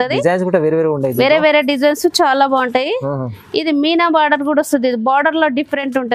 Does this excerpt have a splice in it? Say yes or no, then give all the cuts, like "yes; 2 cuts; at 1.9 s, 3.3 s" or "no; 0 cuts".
no; 0 cuts